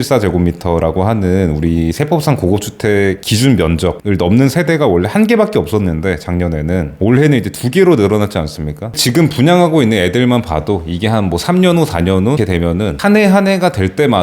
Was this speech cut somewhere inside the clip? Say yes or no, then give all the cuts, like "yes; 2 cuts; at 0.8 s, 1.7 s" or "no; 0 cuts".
yes; 1 cut; at 12.4 s